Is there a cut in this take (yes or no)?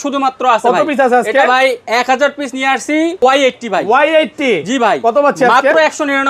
yes